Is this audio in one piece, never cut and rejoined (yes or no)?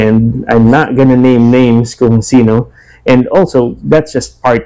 yes